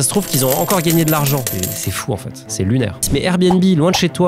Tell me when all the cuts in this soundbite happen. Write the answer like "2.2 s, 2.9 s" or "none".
3.1 s